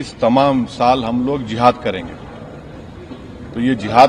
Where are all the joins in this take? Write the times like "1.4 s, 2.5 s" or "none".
none